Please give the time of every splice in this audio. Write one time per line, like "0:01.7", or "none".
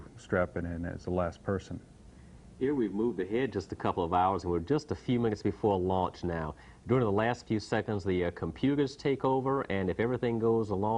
none